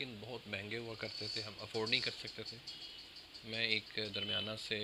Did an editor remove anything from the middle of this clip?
no; 0 cuts

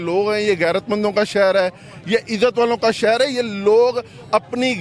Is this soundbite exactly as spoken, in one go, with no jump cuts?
yes; 0 cuts

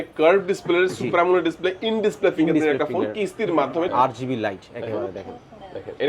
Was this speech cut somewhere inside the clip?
yes; 1 cut; at 3.9 s

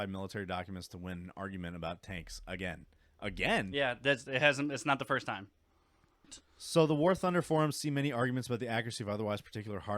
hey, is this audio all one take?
no; 1 cut; at 6.4 s

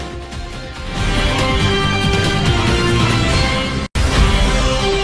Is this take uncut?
yes; 0 cuts

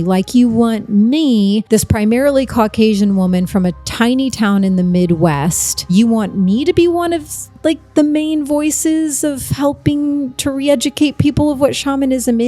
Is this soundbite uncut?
no; 2 cuts; at 1.6 s, 5.9 s

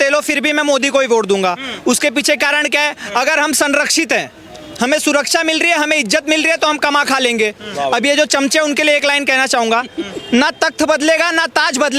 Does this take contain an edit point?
no; 0 cuts

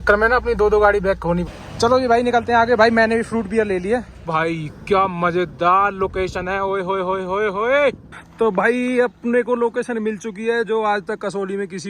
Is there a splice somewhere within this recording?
yes; 3 cuts; at 1.5 s, 4.2 s, 8.1 s

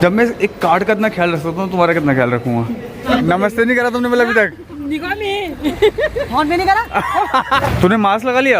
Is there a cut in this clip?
yes; 2 cuts; at 3.0 s, 7.2 s

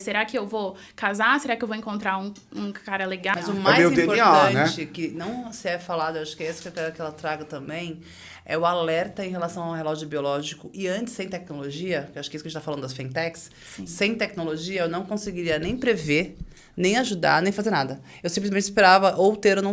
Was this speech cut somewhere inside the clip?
yes; 1 cut; at 3.3 s

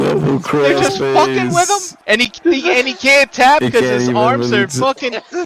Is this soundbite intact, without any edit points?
no; 1 cut; at 1.9 s

